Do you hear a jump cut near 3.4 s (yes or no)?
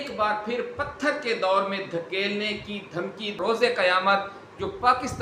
yes